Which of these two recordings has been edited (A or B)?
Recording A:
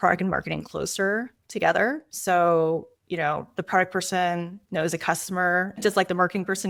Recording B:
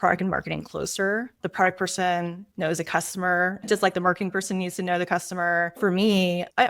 B